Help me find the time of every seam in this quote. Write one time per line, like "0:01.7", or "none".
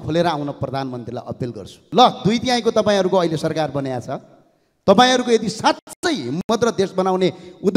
0:01.7